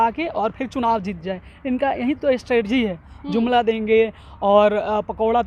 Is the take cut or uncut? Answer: uncut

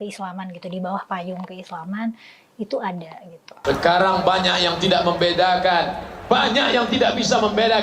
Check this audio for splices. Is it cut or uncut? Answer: cut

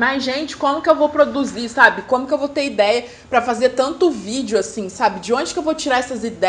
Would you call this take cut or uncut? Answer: uncut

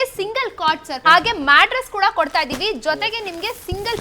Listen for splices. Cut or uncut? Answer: cut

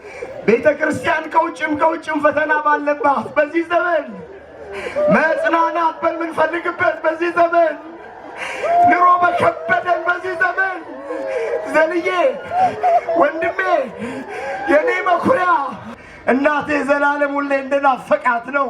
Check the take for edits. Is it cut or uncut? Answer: cut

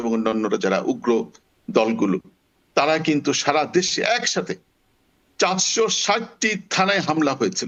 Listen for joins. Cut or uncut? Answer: uncut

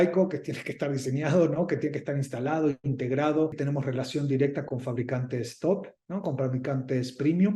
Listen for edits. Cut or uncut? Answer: cut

